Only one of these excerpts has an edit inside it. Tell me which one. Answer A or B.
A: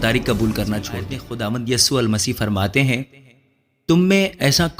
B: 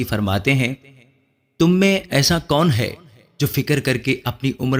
A